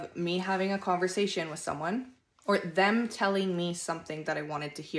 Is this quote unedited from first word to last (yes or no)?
yes